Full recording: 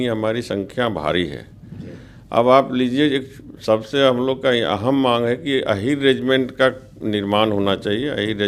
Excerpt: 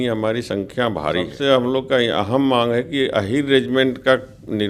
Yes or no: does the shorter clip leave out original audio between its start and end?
yes